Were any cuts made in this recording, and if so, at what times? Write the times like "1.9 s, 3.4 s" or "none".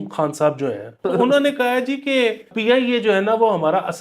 1.0 s, 2.5 s